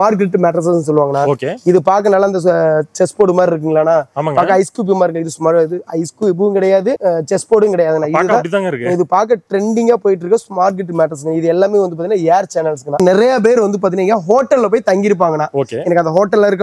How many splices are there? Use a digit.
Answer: 2